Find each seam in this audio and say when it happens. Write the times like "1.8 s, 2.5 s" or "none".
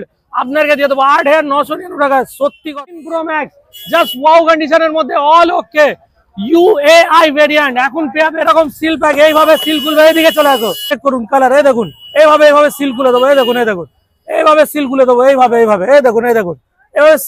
2.7 s, 10.9 s

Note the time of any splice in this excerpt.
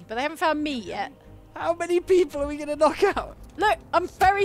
3.1 s

